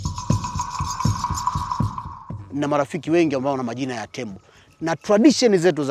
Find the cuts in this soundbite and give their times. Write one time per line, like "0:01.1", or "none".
0:02.1

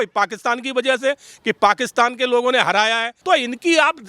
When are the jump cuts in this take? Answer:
0:03.1

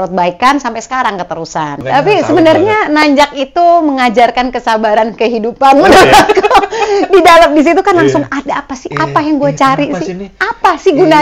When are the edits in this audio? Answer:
0:01.8

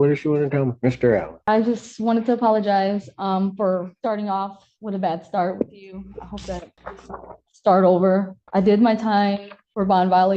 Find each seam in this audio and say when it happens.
none

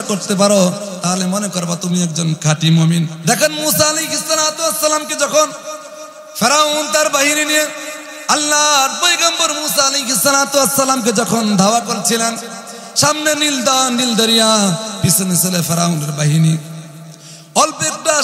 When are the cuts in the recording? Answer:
0:03.1

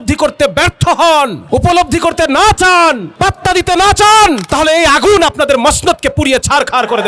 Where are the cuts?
0:01.4
0:03.1
0:04.4

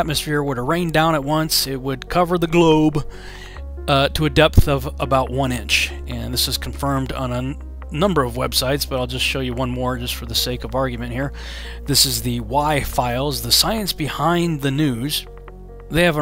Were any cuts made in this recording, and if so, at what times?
0:14.2

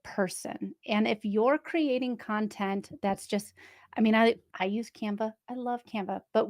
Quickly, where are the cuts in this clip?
0:04.5

